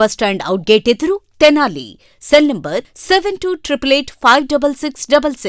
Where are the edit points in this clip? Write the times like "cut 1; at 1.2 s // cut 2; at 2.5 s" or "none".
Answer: none